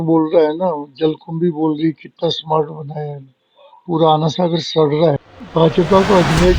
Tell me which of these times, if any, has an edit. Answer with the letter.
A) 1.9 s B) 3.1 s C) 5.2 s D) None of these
C